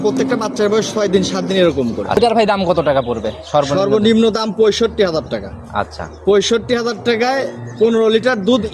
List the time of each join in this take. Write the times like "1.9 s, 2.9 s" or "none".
2.2 s